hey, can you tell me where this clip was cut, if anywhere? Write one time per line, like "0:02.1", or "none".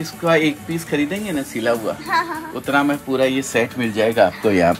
none